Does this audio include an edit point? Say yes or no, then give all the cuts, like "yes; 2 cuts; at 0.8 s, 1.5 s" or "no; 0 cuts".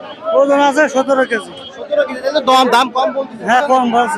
no; 0 cuts